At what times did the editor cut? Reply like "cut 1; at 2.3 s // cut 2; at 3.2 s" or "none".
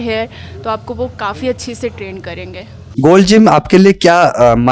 cut 1; at 2.8 s